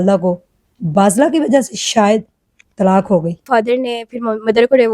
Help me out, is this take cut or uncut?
cut